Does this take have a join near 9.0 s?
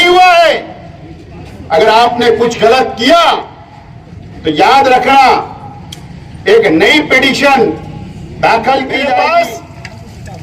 yes; 1 cut; at 9.0 s

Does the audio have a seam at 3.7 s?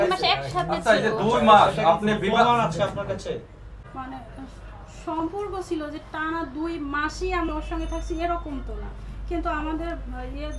yes; 1 cut; at 3.7 s

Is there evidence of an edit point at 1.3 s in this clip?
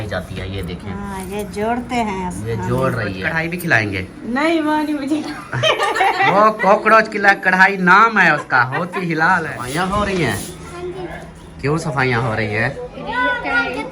no; 2 cuts; at 3.3 s, 9.6 s

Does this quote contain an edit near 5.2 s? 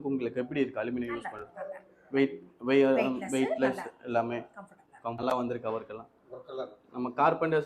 yes; 1 cut; at 5.2 s

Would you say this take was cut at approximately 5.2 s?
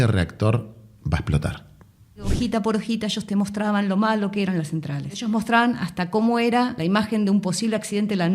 yes; 3 cuts; at 2.3 s, 5.2 s, 6.8 s

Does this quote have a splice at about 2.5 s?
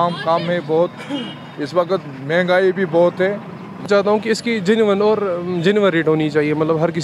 no; 1 cut; at 3.9 s

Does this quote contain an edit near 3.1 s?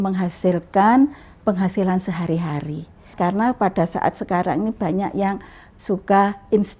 yes; 1 cut; at 3.1 s

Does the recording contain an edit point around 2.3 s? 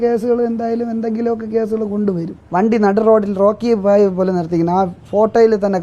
yes; 1 cut; at 2.3 s

